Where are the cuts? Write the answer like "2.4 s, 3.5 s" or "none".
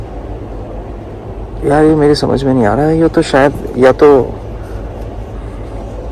none